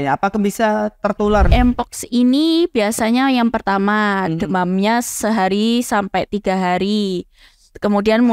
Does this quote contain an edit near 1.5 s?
yes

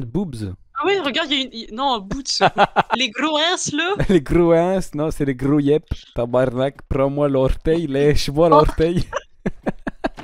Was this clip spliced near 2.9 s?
yes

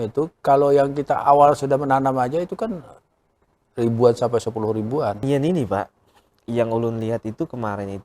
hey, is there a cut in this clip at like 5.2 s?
yes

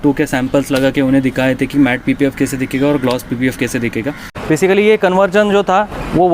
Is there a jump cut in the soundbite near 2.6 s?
no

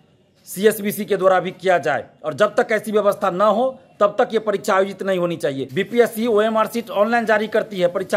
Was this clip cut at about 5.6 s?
yes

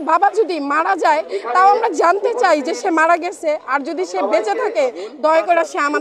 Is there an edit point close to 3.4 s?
no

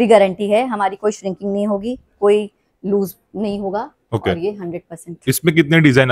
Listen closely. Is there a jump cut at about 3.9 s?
no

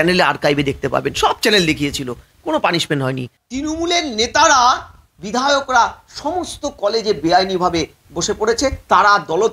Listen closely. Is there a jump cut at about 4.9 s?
no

